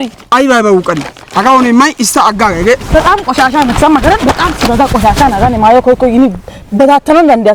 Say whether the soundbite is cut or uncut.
uncut